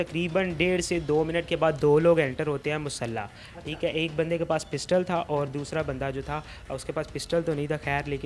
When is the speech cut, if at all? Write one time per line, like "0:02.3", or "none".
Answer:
none